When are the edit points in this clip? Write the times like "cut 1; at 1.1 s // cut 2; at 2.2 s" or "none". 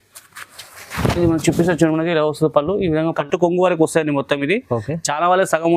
cut 1; at 3.2 s